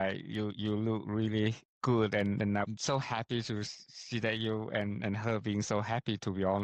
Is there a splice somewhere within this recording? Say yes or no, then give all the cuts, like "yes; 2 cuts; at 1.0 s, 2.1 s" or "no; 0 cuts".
no; 0 cuts